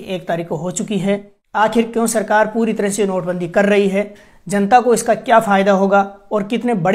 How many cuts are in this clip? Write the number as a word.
one